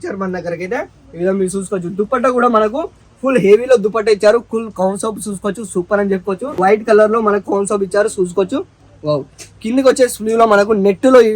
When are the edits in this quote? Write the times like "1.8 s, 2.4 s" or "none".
6.6 s